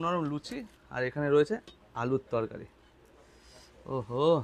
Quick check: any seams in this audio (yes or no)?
no